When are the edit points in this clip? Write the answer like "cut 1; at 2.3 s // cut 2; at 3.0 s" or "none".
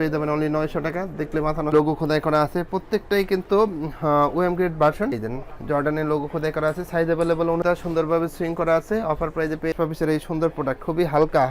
cut 1; at 1.7 s // cut 2; at 7.6 s // cut 3; at 9.7 s